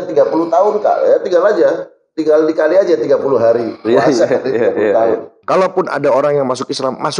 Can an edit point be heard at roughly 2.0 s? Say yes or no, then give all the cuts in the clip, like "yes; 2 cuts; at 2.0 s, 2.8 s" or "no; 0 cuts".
no; 1 cut; at 5.3 s